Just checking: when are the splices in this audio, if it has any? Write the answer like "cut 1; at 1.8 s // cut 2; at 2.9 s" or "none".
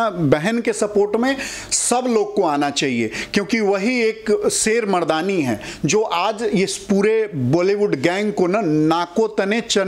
none